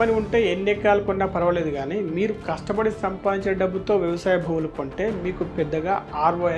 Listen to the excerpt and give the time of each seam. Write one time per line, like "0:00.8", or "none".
none

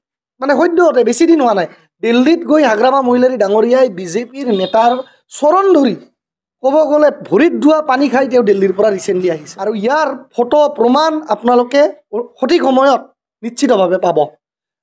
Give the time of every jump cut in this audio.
0:09.5

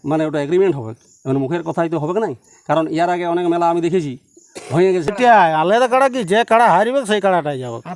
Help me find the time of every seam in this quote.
0:05.1

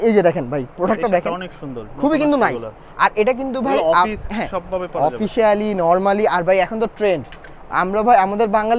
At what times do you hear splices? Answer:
none

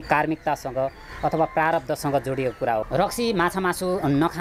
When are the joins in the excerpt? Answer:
0:02.9

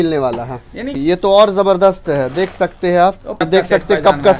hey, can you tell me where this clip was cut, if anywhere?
0:01.0
0:03.4

